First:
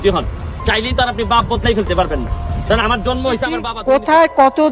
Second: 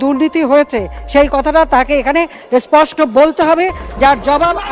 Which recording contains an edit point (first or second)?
first